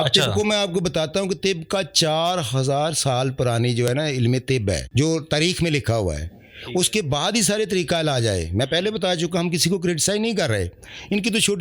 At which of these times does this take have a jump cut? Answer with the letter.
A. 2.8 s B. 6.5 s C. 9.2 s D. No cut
D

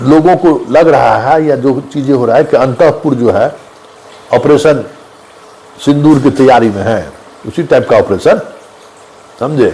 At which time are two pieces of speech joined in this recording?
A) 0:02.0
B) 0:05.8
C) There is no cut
C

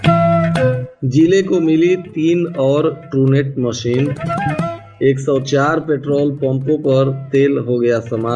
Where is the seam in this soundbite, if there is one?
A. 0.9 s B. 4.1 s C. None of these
A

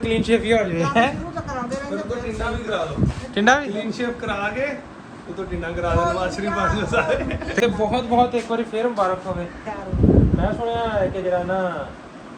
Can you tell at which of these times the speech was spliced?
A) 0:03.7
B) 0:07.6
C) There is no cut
B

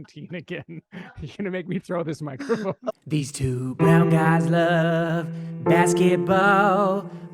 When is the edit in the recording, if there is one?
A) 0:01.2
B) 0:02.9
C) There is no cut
B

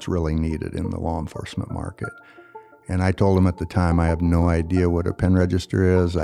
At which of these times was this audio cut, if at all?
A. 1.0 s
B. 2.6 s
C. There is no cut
C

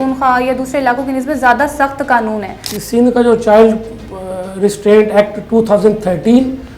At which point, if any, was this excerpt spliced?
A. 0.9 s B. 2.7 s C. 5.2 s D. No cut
B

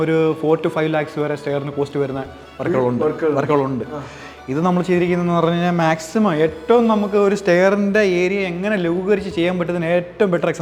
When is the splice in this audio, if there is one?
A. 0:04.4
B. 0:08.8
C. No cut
C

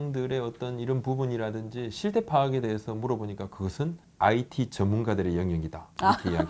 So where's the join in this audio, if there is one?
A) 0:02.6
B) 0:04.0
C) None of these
B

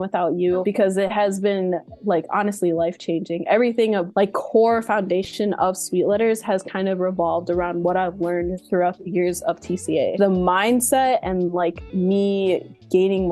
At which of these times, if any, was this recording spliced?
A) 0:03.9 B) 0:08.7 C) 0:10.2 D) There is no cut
C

